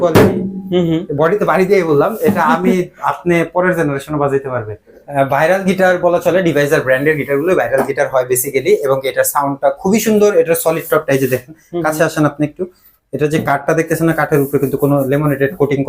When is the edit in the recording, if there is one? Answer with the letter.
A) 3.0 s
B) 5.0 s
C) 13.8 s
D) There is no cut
B